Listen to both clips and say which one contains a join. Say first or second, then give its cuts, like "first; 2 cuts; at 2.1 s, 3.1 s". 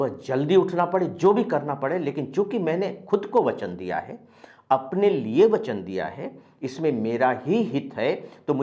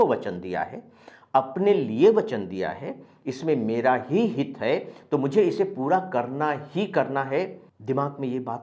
second; 1 cut; at 7.7 s